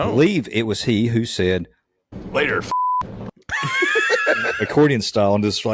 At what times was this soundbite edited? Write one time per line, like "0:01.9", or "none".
0:04.5